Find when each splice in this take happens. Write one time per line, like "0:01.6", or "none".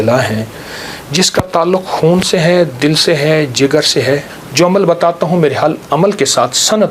0:04.4